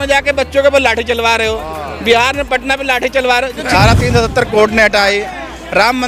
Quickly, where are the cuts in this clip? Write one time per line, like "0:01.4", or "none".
0:03.7